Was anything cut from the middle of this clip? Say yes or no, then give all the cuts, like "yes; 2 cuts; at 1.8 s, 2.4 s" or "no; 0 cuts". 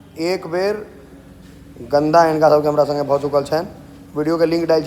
no; 0 cuts